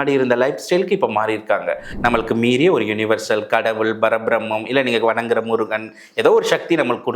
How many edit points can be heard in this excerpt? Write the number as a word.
one